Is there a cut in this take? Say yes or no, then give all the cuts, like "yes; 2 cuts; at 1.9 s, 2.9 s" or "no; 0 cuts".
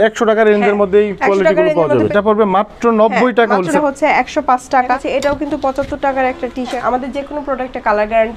yes; 4 cuts; at 2.1 s, 3.7 s, 5.0 s, 6.8 s